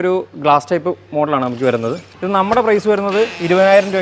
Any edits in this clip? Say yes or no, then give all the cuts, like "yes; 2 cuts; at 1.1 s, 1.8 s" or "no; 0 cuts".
yes; 1 cut; at 2.1 s